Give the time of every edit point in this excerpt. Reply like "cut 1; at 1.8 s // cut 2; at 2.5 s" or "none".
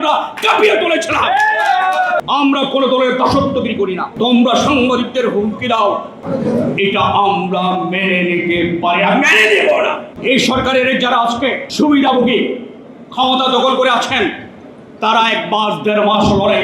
cut 1; at 2.2 s // cut 2; at 4.1 s // cut 3; at 6.1 s // cut 4; at 10.1 s // cut 5; at 11.6 s